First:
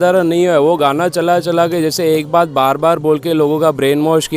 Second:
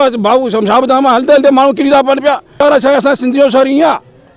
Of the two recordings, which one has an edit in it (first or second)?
second